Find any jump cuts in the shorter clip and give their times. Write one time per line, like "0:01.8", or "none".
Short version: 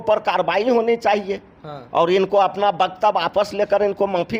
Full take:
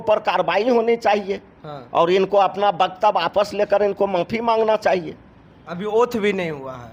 none